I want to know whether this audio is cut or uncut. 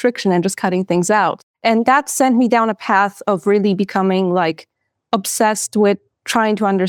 uncut